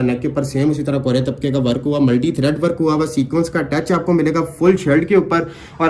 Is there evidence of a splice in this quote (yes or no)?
no